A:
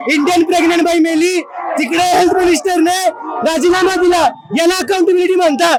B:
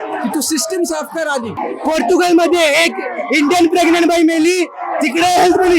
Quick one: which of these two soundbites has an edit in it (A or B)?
B